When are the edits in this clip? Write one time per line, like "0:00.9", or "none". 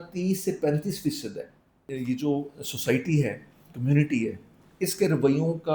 0:01.9